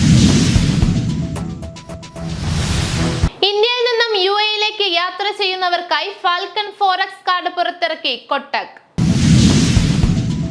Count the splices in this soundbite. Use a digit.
2